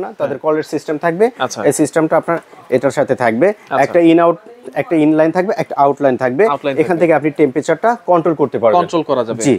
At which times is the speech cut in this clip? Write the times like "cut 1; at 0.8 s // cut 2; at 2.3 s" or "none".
none